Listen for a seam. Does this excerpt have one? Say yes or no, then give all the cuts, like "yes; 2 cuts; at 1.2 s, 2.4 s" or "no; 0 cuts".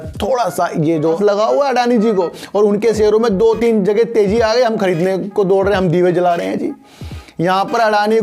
yes; 1 cut; at 1.0 s